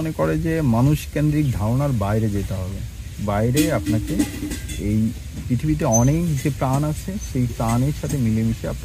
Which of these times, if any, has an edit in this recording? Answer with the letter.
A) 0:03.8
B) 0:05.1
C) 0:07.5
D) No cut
D